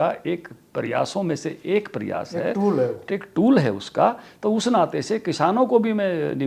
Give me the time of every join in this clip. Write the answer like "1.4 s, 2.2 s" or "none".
none